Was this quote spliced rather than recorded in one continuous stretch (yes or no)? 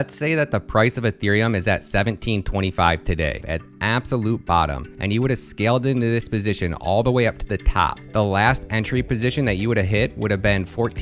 yes